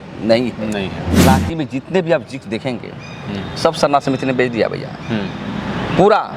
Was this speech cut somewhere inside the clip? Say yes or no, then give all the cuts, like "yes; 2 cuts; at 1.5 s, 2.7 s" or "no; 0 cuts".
yes; 1 cut; at 1.2 s